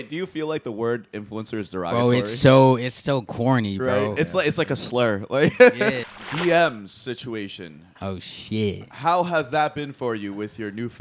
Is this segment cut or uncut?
cut